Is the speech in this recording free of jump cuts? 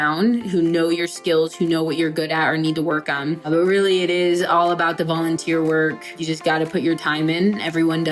no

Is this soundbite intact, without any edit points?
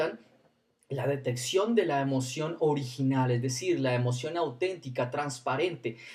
yes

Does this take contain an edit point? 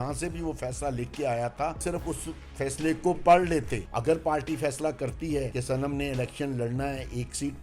yes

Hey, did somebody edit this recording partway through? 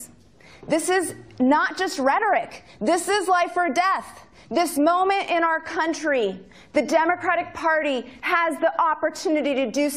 yes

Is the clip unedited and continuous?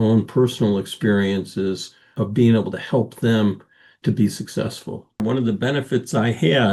no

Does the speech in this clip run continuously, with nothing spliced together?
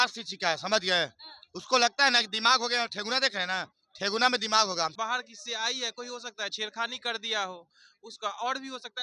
no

